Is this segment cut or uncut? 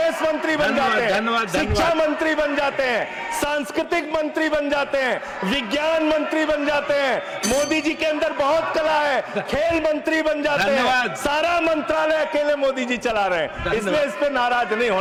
uncut